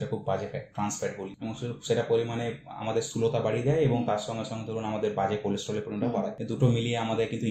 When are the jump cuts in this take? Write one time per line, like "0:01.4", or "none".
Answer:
0:01.3
0:06.4